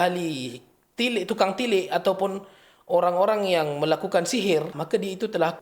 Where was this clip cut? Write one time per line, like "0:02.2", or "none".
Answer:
0:04.7